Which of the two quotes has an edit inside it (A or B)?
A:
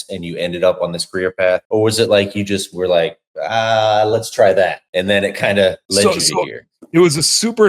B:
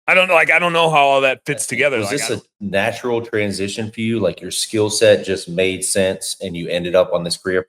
B